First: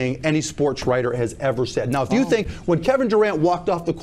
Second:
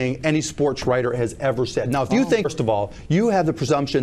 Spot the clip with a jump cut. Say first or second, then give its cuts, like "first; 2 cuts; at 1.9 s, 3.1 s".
second; 1 cut; at 2.5 s